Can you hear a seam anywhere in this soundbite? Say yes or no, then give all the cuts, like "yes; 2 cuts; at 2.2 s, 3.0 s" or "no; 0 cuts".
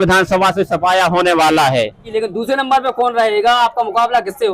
yes; 1 cut; at 2.1 s